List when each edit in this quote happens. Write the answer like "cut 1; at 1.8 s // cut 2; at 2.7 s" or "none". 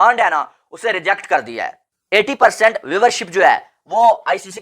cut 1; at 2.0 s